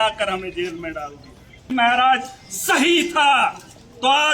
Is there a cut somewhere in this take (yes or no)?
yes